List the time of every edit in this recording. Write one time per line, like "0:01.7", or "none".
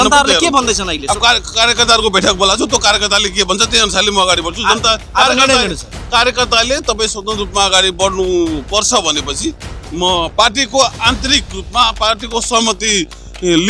none

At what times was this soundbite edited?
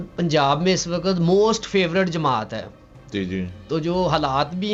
none

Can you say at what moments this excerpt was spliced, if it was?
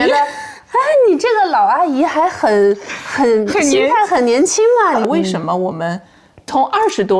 0:05.0

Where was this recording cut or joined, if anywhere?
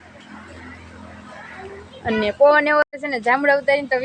0:02.9

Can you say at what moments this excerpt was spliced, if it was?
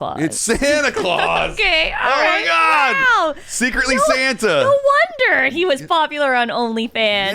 none

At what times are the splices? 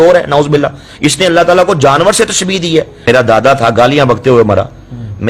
0:03.0

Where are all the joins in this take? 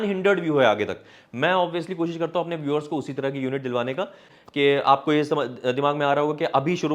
0:04.3

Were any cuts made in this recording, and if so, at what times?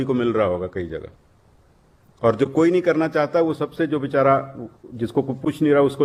none

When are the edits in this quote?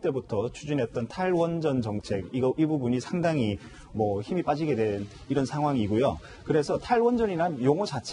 0:04.7

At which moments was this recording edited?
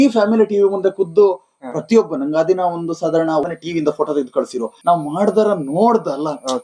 0:04.7

